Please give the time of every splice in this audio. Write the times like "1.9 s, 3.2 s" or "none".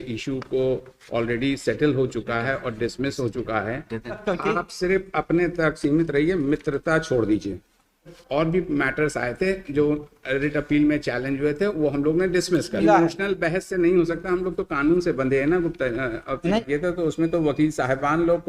4.2 s, 8.1 s, 12.8 s, 16.6 s